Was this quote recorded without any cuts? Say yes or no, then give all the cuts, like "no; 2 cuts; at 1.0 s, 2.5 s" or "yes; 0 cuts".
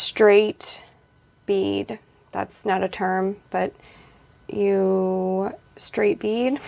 yes; 0 cuts